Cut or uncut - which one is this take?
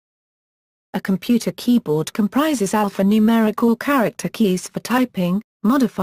uncut